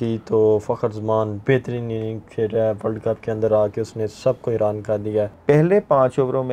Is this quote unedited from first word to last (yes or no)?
no